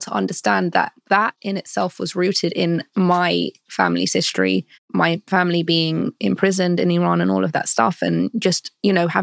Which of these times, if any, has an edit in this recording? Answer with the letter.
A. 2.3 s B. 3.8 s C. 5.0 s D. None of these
C